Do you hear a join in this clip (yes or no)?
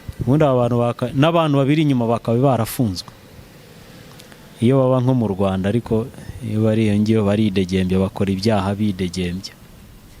no